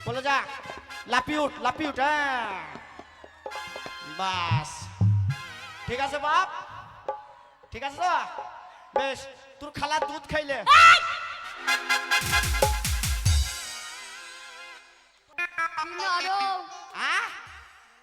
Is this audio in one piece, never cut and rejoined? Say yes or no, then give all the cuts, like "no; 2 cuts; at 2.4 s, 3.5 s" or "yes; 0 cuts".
no; 1 cut; at 15.3 s